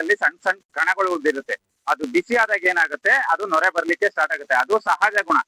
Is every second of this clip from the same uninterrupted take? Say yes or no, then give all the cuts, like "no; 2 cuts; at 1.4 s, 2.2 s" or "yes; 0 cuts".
yes; 0 cuts